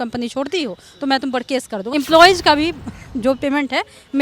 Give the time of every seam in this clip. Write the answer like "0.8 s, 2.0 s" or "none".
1.8 s